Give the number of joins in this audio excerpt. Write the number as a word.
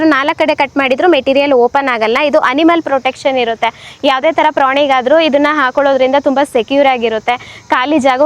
zero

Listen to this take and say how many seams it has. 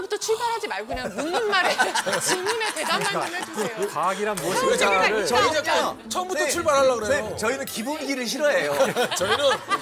zero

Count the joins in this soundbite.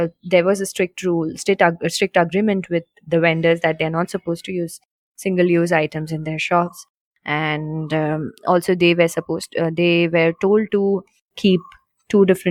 zero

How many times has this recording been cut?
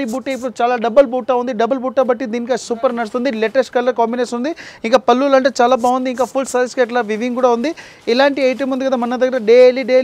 zero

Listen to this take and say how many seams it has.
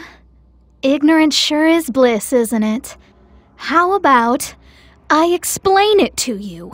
zero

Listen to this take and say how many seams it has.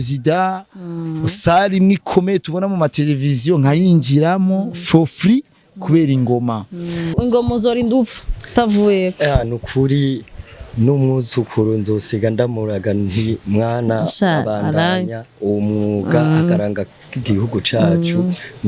one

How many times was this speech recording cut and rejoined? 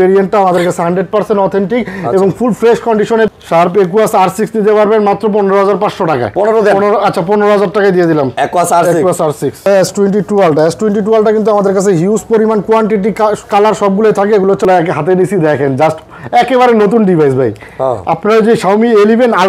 three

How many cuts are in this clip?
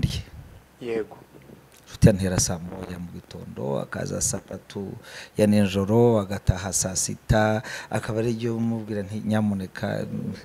zero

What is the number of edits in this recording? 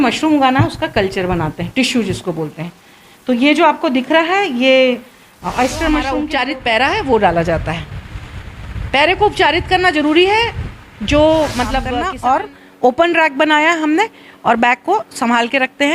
two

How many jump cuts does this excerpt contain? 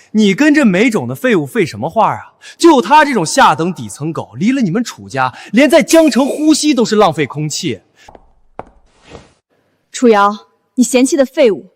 one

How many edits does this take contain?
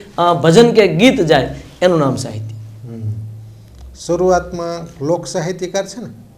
zero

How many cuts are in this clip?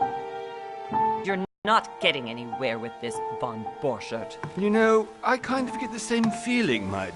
one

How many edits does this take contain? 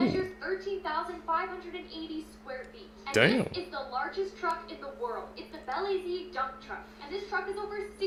zero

